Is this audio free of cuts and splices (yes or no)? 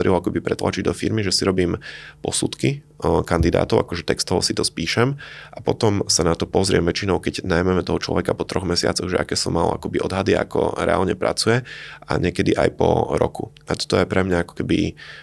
yes